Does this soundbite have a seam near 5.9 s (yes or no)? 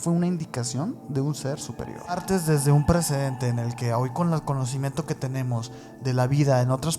no